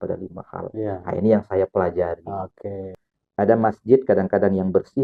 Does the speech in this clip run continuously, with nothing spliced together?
no; 1 cut; at 2.9 s

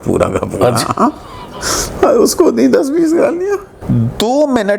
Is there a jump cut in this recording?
yes; 1 cut; at 3.7 s

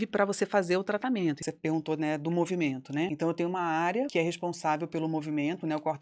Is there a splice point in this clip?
yes; 3 cuts; at 1.4 s, 3.1 s, 4.1 s

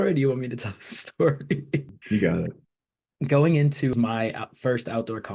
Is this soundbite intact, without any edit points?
no; 3 cuts; at 1.9 s, 2.9 s, 3.9 s

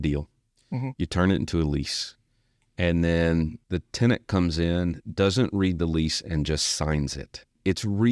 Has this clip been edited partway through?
no; 0 cuts

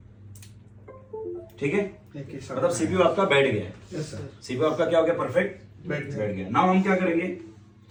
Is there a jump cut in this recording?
no; 0 cuts

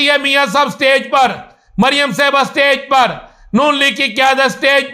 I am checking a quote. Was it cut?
no; 0 cuts

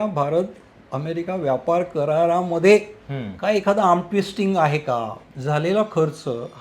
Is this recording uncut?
no; 1 cut; at 5.2 s

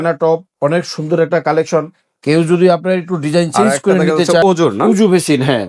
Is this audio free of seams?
no; 1 cut; at 4.4 s

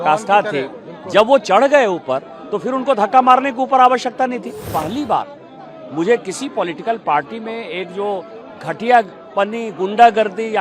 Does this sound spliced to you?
yes; 1 cut; at 4.6 s

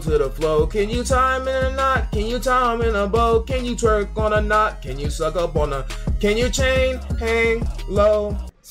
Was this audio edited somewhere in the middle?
no; 0 cuts

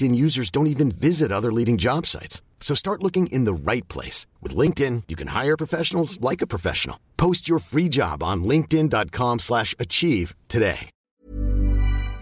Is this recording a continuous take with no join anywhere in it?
no; 1 cut; at 10.9 s

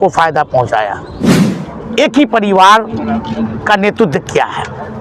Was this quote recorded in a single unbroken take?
no; 1 cut; at 1.4 s

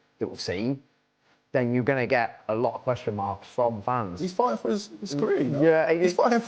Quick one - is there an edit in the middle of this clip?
no; 0 cuts

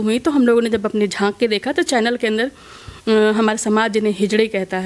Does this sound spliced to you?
no; 0 cuts

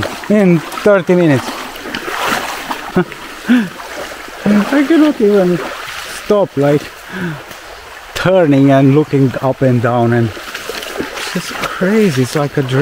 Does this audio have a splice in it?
yes; 1 cut; at 2.9 s

